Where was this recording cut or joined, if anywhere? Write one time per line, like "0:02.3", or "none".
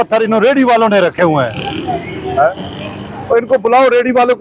none